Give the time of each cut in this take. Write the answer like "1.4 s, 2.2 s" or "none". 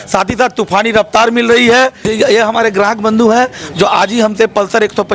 2.1 s